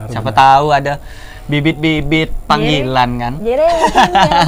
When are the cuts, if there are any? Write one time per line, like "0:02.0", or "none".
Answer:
none